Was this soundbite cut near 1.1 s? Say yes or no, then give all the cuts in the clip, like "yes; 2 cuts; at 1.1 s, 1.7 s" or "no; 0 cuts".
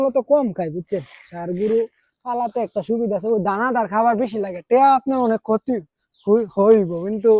no; 0 cuts